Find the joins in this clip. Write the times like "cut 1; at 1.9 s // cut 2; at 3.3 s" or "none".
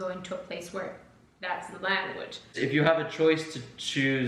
cut 1; at 2.6 s